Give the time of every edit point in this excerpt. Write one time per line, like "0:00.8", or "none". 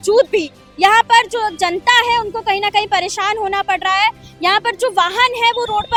none